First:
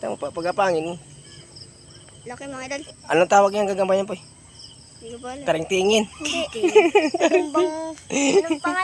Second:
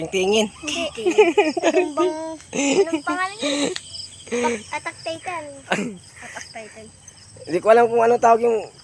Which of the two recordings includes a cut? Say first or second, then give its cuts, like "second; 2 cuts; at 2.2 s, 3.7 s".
first; 1 cut; at 2.9 s